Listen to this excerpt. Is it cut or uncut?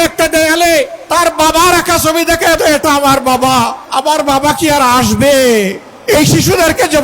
cut